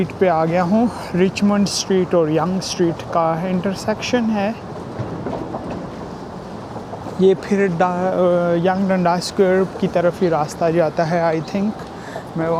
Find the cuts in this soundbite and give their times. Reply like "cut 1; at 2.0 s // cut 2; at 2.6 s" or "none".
none

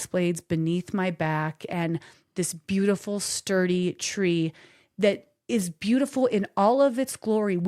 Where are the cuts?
none

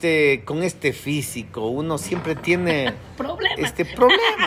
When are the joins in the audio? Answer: none

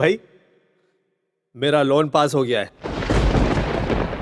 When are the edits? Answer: cut 1; at 2.4 s

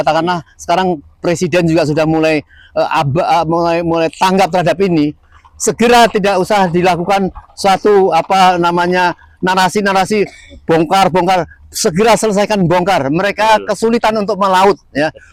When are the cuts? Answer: none

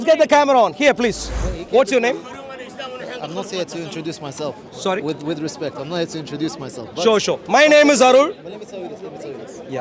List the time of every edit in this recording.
cut 1; at 1.3 s

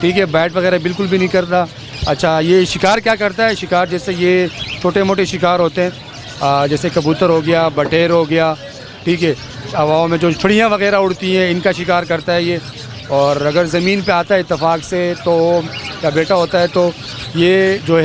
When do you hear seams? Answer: none

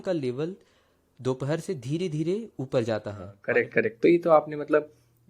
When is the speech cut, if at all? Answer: cut 1; at 3.4 s

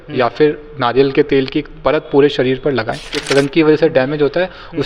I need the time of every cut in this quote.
cut 1; at 3.2 s

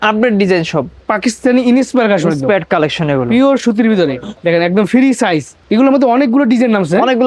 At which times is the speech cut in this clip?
cut 1; at 1.0 s // cut 2; at 4.3 s // cut 3; at 5.5 s

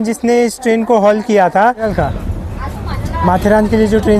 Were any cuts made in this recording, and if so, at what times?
cut 1; at 1.9 s

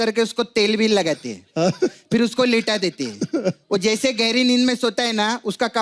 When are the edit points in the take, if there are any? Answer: none

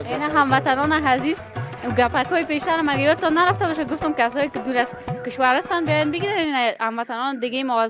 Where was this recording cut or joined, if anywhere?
none

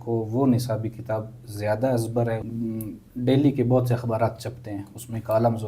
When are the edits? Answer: cut 1; at 2.5 s

